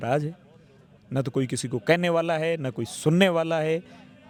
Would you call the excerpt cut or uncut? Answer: uncut